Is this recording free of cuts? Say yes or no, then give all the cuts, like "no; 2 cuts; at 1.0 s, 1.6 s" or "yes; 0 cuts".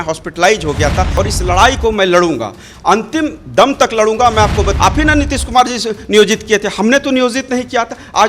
no; 2 cuts; at 1.1 s, 4.7 s